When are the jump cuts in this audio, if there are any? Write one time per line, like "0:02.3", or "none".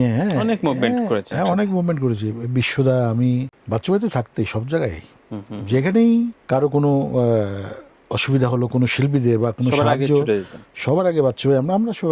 0:03.6
0:06.4